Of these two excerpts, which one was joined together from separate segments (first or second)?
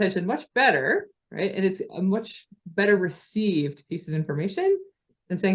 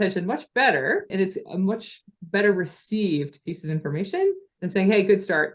second